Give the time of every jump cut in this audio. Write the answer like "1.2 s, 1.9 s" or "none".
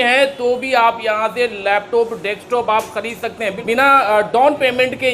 3.6 s